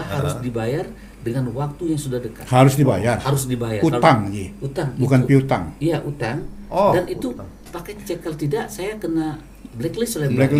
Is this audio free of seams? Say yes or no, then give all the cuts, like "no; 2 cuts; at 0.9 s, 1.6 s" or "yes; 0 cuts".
yes; 0 cuts